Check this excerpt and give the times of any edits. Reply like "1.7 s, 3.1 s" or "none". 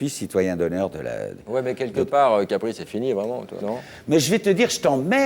3.5 s